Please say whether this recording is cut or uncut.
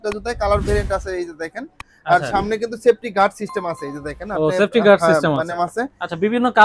cut